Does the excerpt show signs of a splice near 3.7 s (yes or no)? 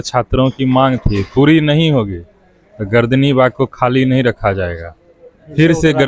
no